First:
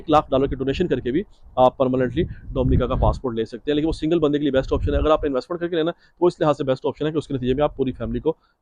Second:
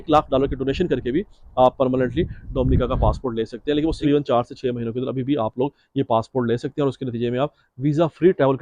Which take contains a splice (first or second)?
second